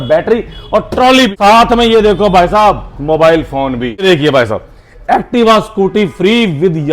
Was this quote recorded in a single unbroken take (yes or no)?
no